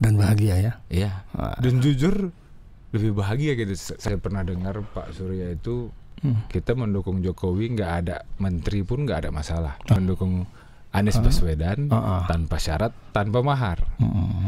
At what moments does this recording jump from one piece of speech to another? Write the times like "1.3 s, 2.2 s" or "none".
4.0 s, 10.0 s